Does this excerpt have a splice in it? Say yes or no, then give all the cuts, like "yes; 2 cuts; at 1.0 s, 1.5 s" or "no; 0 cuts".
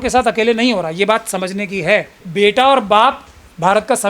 yes; 1 cut; at 2.2 s